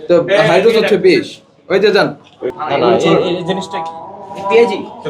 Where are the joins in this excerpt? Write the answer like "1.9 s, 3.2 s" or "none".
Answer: 2.5 s